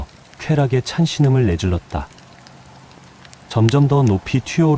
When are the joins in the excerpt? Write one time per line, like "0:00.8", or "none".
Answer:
0:02.1
0:03.5